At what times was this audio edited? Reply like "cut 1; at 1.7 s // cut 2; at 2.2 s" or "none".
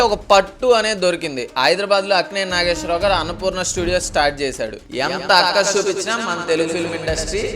cut 1; at 4.8 s